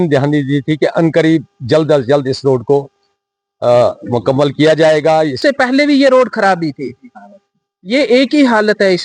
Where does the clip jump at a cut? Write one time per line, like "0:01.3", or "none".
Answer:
0:05.4

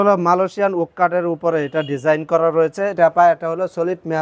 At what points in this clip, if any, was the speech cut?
0:02.9

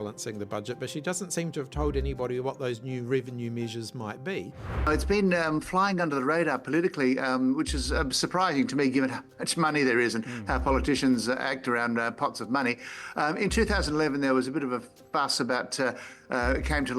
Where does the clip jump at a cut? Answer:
0:04.9

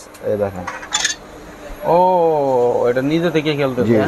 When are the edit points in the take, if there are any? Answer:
none

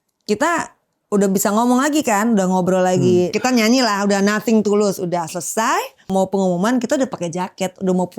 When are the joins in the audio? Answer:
0:03.3
0:06.1

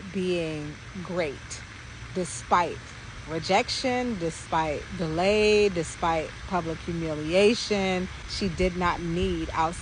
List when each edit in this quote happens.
0:08.2

